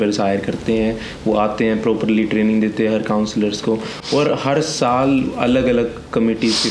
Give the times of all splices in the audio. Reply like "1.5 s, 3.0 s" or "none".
none